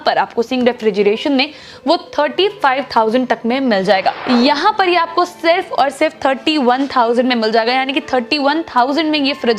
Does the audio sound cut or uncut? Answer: cut